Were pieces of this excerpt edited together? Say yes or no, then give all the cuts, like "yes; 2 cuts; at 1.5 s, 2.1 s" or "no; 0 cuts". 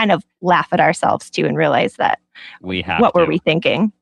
no; 0 cuts